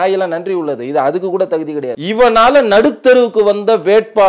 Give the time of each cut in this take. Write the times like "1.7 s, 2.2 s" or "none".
2.0 s